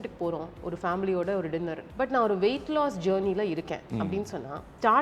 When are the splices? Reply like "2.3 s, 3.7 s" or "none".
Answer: 1.8 s